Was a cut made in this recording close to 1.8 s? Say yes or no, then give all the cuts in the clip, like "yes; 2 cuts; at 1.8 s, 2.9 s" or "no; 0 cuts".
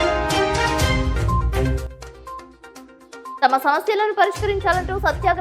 yes; 1 cut; at 1.8 s